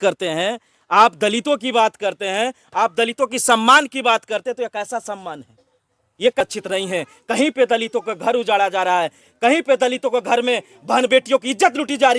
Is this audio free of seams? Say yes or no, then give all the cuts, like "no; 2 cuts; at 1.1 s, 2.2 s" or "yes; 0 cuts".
no; 1 cut; at 6.4 s